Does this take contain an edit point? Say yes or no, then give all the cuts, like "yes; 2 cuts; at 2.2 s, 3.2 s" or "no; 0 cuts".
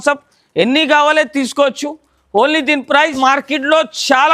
yes; 1 cut; at 3.1 s